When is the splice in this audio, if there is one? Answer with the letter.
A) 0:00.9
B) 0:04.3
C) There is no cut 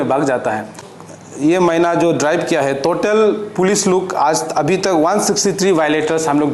A